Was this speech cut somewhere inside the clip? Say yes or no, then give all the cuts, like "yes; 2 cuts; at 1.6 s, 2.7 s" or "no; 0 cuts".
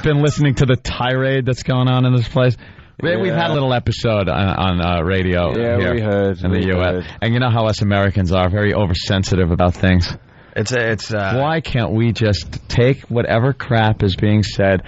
no; 0 cuts